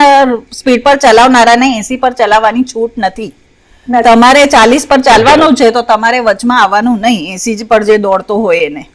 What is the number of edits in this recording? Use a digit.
0